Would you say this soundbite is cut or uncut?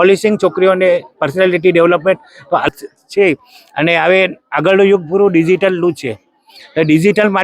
cut